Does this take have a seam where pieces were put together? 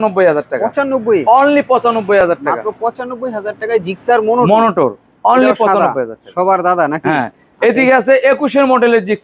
no; 0 cuts

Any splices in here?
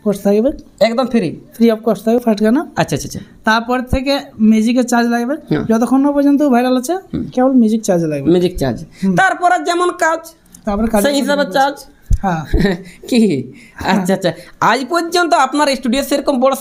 no; 0 cuts

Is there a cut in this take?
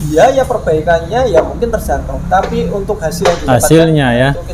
no; 0 cuts

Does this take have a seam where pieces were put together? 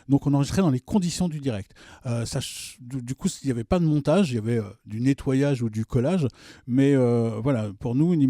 no; 0 cuts

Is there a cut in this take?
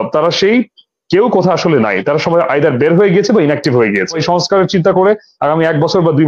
yes; 1 cut; at 4.2 s

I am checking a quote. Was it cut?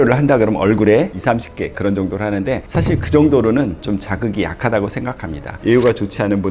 yes; 2 cuts; at 1.2 s, 5.6 s

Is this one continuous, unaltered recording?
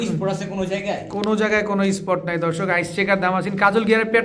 yes; 0 cuts

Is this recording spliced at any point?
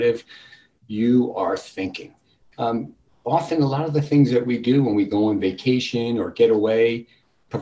no; 0 cuts

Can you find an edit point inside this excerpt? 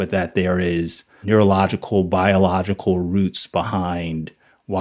yes; 1 cut; at 1.1 s

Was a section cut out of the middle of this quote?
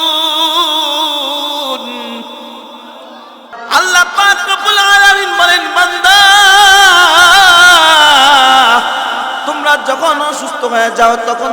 yes; 1 cut; at 3.5 s

